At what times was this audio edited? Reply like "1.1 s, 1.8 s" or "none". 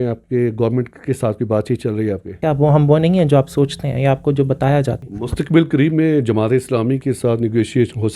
2.4 s, 5.1 s

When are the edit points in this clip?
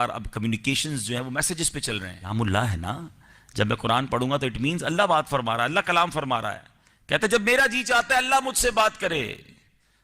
2.1 s

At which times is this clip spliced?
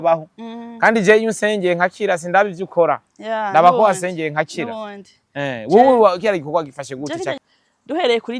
7.4 s

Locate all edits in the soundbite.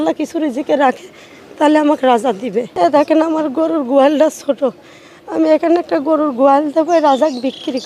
2.7 s

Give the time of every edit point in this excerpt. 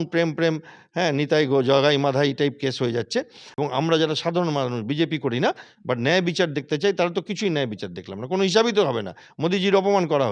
3.4 s

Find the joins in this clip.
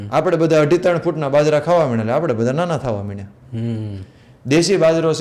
none

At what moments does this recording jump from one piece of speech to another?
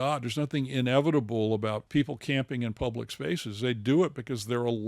1.8 s

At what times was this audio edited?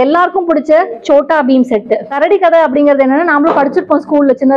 2.1 s

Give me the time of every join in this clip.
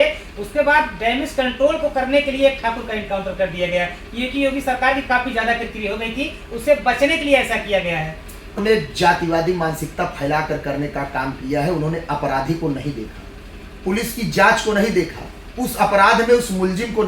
8.6 s

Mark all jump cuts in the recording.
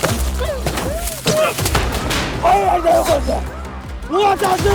none

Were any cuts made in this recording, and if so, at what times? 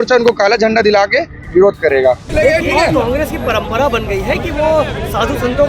2.2 s

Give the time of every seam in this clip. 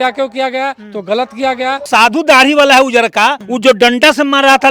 1.9 s, 3.5 s

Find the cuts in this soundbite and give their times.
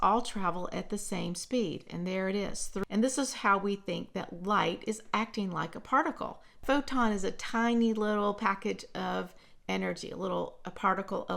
2.7 s, 6.6 s

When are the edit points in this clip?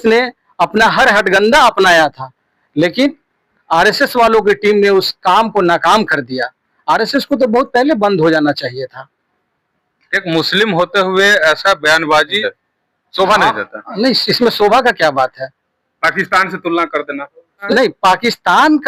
none

